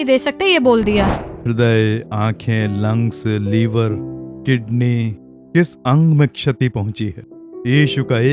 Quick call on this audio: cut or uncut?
cut